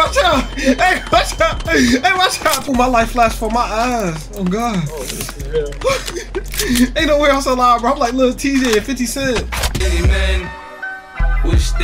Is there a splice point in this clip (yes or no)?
yes